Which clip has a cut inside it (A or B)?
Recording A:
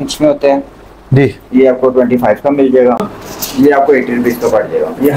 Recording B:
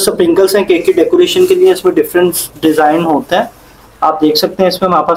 A